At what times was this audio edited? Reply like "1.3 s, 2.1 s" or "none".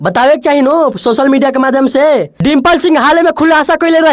2.3 s